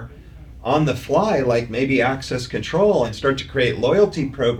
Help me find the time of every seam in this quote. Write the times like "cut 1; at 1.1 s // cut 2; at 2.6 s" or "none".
cut 1; at 3.1 s